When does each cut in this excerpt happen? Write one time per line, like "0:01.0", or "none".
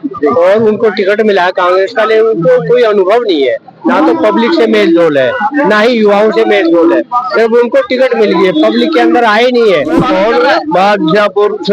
0:10.1